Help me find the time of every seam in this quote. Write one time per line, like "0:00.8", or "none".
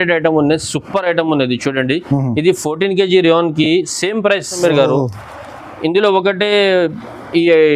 0:04.6